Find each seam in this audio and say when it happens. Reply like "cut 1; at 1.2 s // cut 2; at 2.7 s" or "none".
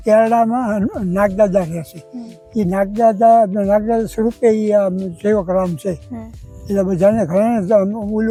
none